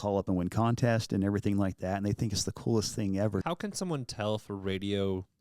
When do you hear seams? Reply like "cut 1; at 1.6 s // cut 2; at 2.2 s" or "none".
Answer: cut 1; at 3.4 s